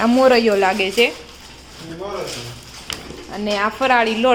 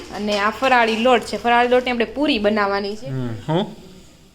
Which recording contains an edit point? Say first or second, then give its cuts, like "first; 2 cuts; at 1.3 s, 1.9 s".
second; 1 cut; at 2.9 s